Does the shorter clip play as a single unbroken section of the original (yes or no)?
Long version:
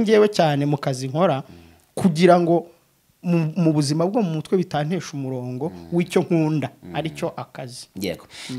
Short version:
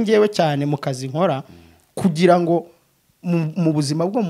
yes